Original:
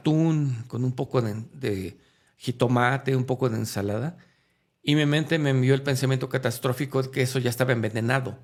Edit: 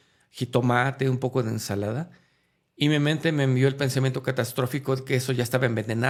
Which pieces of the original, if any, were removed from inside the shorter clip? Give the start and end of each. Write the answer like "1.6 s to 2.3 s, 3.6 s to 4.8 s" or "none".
none